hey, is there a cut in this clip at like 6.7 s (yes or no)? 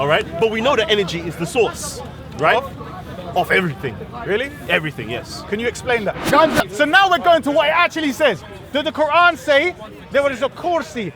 yes